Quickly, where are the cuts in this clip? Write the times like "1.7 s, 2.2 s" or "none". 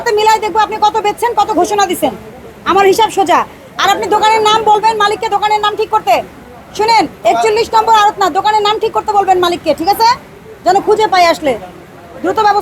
none

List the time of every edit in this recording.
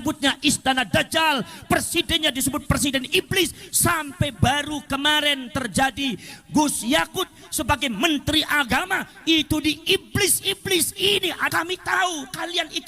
11.4 s

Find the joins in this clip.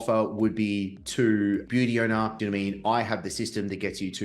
1.0 s, 2.4 s

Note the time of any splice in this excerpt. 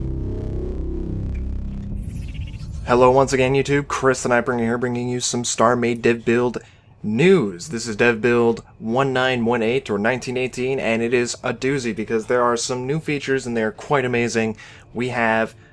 none

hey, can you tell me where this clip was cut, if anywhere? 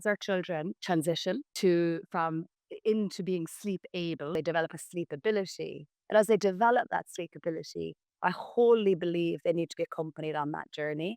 0.8 s, 1.5 s, 4.3 s

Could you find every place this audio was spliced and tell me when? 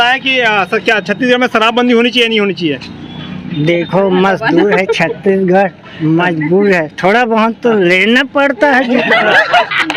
none

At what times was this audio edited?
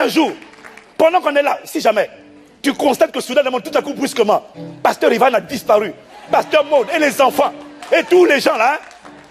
none

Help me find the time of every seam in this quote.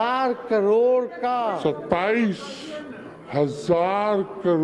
none

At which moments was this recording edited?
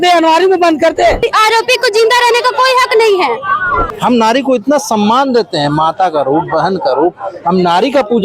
1.2 s, 3.9 s

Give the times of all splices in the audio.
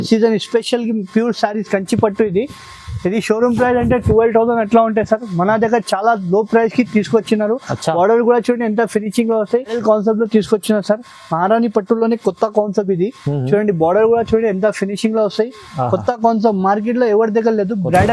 9.8 s

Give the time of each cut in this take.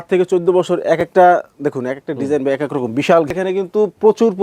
3.3 s

